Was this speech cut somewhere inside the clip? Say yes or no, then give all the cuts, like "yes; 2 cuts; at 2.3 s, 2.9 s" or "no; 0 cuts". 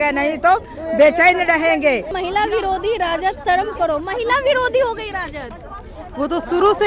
yes; 1 cut; at 2.1 s